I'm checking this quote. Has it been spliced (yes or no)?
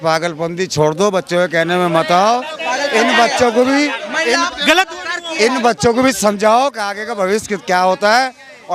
no